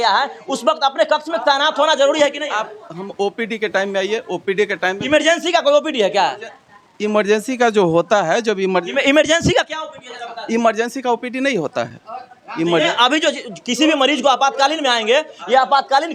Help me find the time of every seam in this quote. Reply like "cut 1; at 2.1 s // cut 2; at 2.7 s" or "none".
none